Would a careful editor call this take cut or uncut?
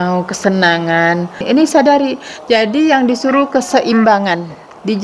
cut